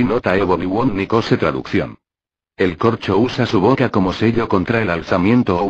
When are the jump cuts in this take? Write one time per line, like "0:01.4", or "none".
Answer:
0:01.3